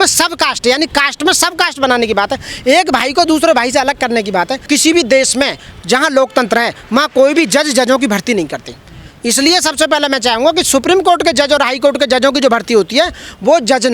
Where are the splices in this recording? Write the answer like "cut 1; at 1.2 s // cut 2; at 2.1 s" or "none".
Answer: cut 1; at 4.6 s